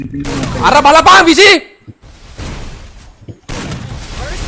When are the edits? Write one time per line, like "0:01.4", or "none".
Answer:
none